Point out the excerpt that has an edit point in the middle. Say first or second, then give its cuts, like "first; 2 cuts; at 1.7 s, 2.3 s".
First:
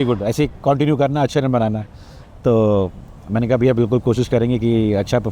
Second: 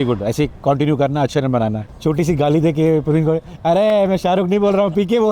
second; 1 cut; at 1.9 s